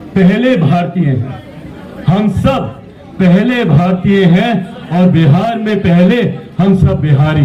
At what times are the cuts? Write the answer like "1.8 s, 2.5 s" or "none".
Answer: none